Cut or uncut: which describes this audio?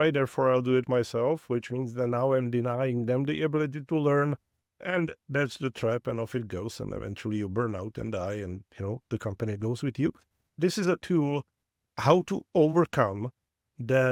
uncut